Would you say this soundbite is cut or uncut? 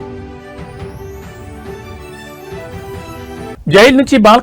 cut